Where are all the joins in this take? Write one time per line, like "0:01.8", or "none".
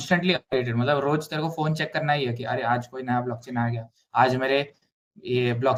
none